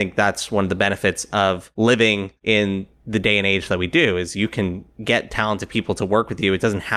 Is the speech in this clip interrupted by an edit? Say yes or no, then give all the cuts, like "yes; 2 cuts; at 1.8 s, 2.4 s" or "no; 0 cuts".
yes; 2 cuts; at 1.7 s, 2.3 s